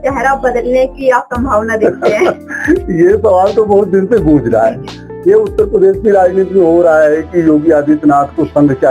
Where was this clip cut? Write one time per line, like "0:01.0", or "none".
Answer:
none